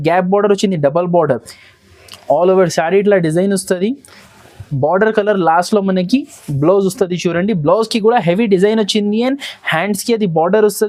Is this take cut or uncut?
uncut